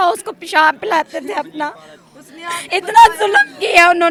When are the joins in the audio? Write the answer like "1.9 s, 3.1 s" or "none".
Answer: none